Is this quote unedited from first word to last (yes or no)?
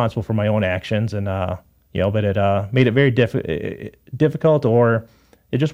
yes